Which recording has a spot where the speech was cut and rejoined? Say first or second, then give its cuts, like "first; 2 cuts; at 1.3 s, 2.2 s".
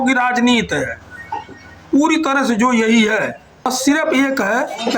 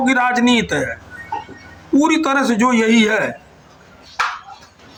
first; 1 cut; at 3.6 s